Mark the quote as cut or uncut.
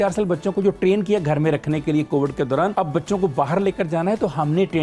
cut